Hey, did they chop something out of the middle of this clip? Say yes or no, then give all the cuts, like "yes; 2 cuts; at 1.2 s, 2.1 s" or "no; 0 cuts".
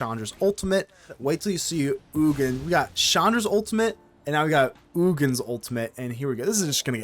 yes; 1 cut; at 1.2 s